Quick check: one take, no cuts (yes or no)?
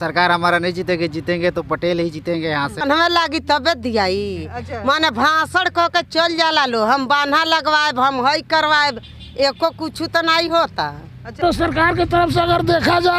no